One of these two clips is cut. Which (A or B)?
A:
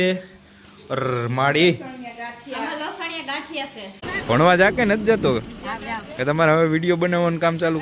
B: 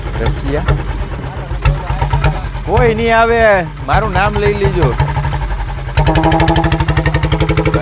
A